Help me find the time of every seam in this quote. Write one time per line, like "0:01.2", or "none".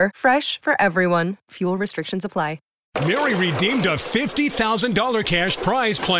0:02.7